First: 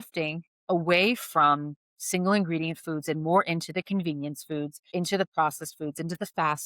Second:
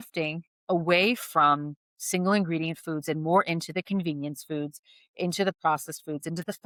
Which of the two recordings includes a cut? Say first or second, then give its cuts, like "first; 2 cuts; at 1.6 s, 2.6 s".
first; 1 cut; at 4.8 s